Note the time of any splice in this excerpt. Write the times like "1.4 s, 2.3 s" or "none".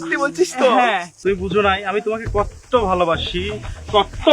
1.1 s